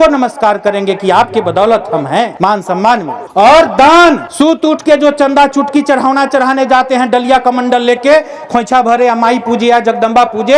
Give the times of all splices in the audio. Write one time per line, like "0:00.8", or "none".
none